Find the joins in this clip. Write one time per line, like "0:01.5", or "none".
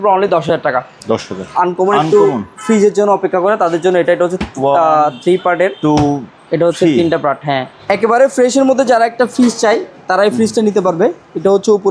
0:01.4
0:07.7

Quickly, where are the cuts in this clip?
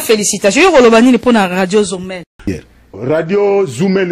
0:02.5

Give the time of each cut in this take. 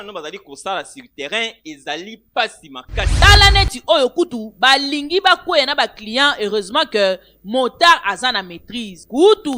0:03.1

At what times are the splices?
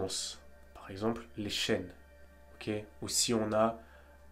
none

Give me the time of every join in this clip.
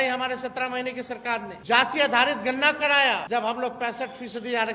0:01.5
0:03.2

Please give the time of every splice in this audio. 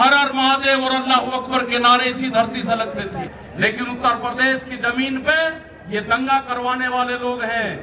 0:03.4

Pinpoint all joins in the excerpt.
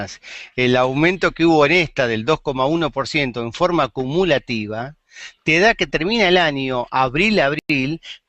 none

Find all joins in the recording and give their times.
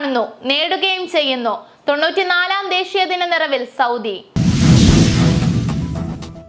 0:04.2

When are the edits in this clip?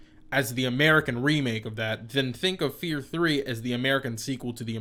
none

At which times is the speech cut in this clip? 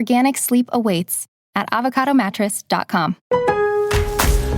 0:03.2

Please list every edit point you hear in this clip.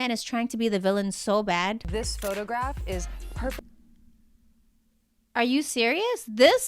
0:01.9

